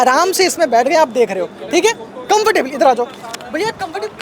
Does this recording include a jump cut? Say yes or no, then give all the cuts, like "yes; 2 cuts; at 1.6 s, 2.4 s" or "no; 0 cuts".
no; 0 cuts